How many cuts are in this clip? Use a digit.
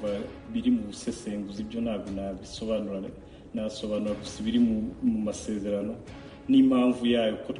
0